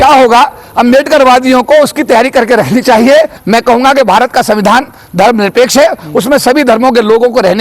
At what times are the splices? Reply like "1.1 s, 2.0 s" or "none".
3.4 s